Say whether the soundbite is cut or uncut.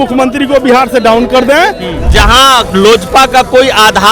cut